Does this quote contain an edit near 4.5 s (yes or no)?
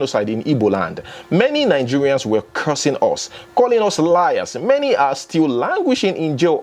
no